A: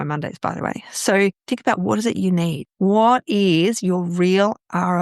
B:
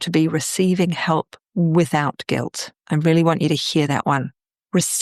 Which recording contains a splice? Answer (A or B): B